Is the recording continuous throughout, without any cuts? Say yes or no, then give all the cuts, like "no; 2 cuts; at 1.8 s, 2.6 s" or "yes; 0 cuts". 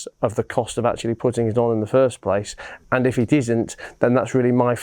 no; 1 cut; at 2.7 s